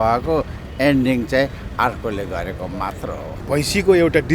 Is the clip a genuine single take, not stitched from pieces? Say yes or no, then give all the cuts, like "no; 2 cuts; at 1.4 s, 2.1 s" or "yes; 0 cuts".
no; 1 cut; at 3.4 s